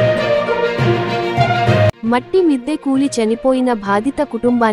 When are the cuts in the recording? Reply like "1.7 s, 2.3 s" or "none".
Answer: 1.9 s